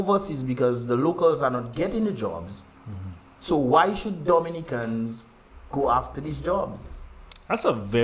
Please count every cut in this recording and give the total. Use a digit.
0